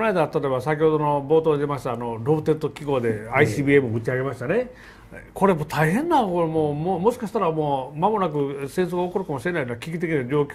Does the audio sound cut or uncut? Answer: uncut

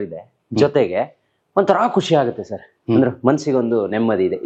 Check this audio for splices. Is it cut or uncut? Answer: uncut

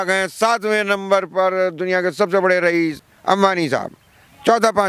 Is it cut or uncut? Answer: cut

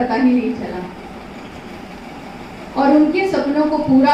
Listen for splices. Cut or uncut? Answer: uncut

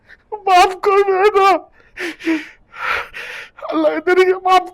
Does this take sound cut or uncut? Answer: uncut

